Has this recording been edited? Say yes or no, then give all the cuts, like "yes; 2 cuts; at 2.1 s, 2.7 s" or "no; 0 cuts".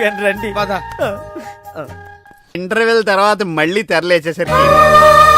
yes; 1 cut; at 2.5 s